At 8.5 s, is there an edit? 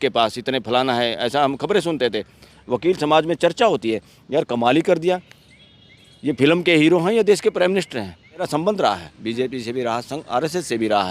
yes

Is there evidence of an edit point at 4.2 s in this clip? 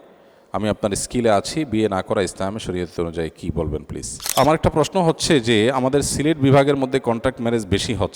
yes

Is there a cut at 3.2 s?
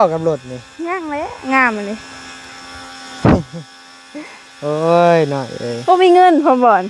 no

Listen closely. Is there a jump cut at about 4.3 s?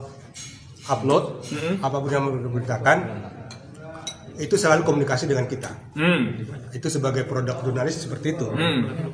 no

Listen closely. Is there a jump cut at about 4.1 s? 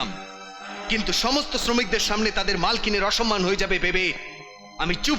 no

